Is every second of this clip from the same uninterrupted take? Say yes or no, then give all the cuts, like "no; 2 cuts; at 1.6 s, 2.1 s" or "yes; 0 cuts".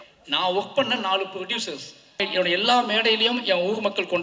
no; 1 cut; at 2.2 s